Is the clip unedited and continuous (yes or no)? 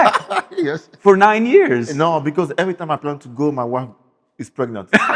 yes